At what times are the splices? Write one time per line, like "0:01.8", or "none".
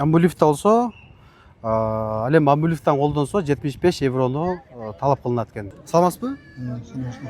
0:05.8